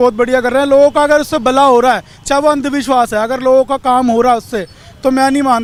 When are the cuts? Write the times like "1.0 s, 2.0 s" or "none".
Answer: none